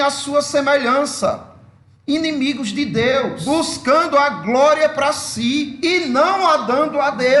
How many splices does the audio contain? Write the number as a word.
two